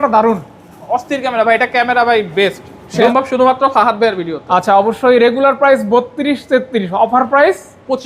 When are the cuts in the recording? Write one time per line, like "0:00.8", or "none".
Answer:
0:03.1